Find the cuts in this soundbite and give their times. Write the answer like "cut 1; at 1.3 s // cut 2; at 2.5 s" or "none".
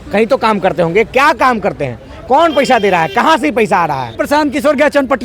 cut 1; at 4.2 s